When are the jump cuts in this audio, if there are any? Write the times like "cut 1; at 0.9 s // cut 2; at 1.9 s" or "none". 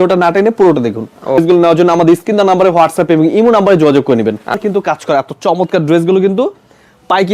cut 1; at 1.4 s // cut 2; at 4.6 s